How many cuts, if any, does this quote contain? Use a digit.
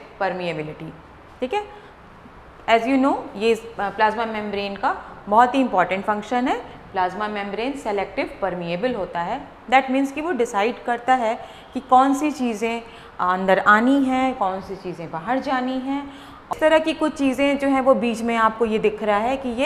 1